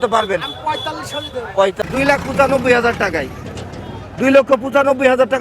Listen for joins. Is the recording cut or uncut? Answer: cut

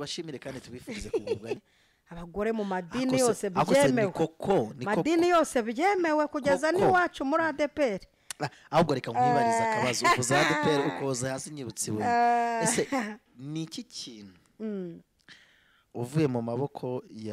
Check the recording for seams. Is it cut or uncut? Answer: cut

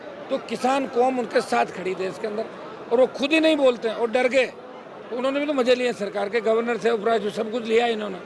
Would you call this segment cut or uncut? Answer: uncut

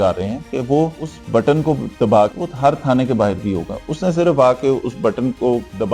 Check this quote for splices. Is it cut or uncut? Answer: uncut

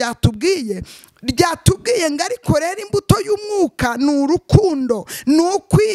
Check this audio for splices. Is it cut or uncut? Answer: uncut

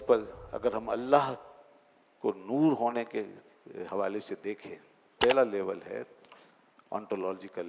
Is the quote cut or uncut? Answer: cut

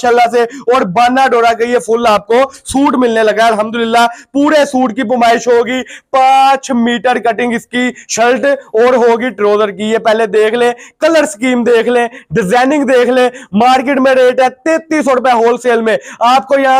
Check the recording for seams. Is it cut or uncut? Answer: uncut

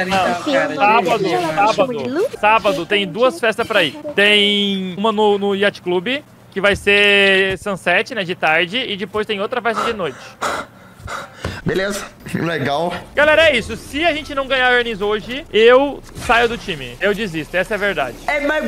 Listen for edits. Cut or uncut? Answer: cut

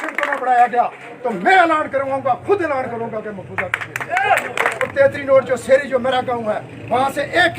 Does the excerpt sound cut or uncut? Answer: cut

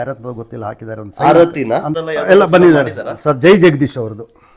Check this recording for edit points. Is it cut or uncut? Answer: cut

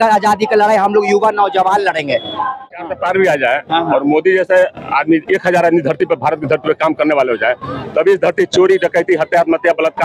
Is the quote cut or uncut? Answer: cut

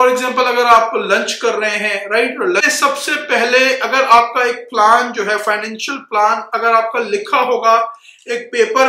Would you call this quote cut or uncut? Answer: cut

